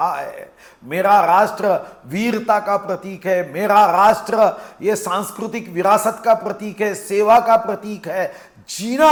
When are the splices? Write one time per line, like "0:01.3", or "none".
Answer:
none